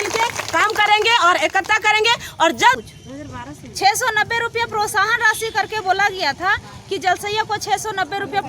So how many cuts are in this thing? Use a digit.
1